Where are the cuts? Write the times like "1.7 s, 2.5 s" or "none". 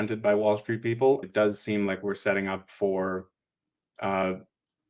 1.3 s, 4.2 s